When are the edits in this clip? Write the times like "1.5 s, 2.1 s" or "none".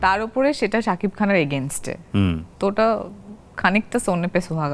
none